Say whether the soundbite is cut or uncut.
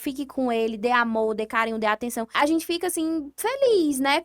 cut